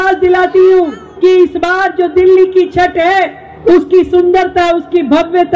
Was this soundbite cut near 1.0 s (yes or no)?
yes